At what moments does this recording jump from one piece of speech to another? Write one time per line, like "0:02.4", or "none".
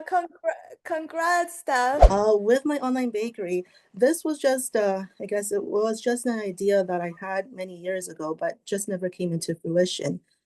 0:02.0

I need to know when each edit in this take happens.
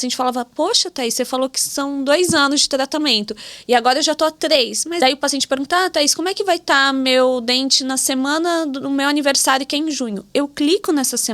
0:05.0

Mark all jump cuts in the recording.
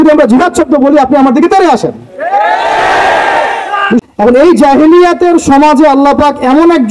0:04.0

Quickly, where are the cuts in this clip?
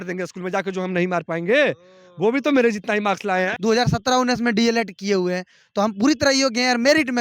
0:03.5

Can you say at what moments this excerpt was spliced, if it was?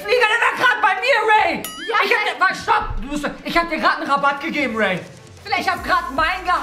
none

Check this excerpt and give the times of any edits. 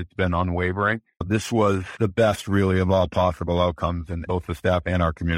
0:01.2
0:01.9
0:04.2

